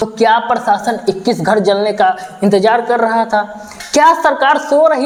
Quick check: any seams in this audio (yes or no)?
no